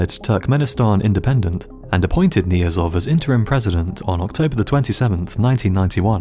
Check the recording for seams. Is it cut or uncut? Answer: cut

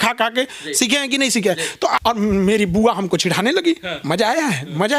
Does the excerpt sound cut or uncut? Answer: cut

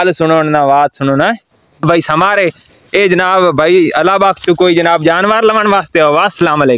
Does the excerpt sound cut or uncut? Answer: cut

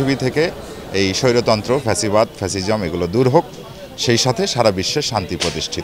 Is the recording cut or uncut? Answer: uncut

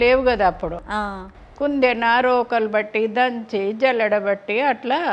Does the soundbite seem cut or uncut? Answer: uncut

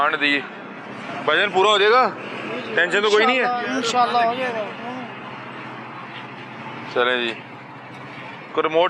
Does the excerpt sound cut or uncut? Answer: uncut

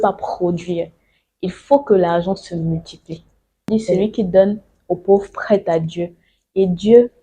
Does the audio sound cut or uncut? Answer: cut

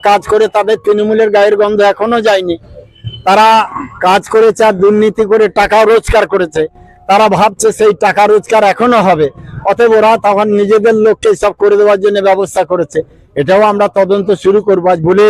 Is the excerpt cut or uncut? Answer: uncut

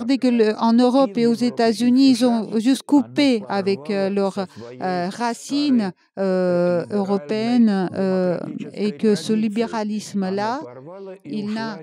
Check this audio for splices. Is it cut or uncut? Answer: uncut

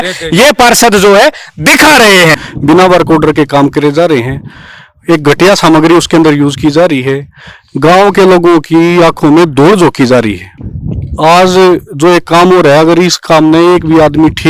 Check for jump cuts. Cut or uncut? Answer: cut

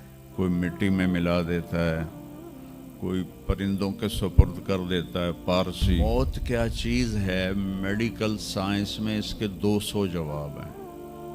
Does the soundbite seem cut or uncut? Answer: cut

